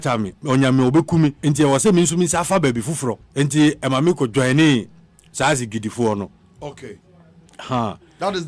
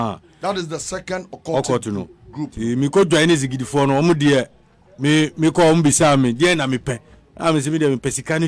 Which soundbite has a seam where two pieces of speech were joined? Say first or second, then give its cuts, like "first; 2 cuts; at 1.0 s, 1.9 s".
first; 2 cuts; at 1.4 s, 3.2 s